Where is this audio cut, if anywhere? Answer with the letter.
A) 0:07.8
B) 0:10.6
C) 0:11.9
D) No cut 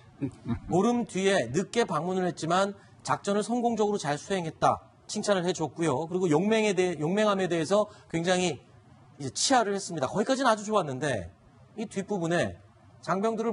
A